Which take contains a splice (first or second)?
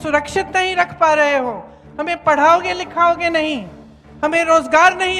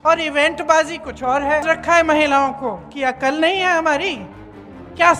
second